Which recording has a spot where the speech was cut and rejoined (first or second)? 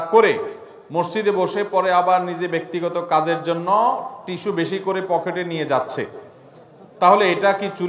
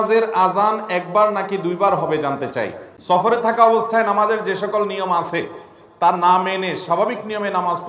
second